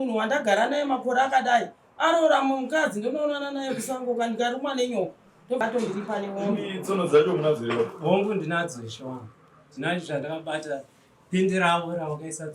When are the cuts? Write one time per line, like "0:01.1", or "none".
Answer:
0:05.6